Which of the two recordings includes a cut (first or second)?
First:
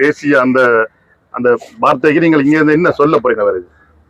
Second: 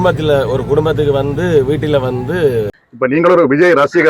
second